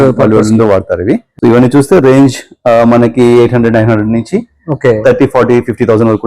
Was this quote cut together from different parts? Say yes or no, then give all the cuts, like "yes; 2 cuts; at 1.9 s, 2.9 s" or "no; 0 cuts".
yes; 1 cut; at 1.3 s